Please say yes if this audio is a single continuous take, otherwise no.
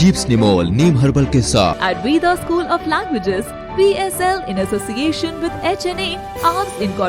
no